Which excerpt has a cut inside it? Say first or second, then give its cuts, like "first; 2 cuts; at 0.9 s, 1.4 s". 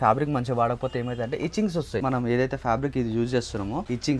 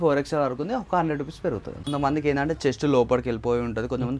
first; 1 cut; at 2.0 s